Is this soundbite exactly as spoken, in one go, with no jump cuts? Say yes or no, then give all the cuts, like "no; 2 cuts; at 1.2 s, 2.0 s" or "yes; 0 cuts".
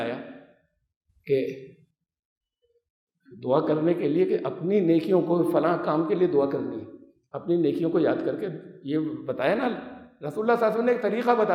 yes; 0 cuts